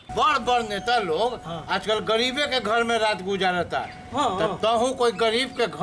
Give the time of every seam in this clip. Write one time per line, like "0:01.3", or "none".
none